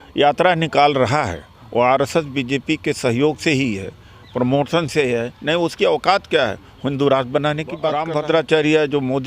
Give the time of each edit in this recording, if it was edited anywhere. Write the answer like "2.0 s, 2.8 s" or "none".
7.9 s